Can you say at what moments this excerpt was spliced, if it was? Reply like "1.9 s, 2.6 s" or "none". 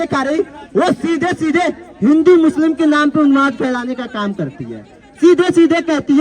none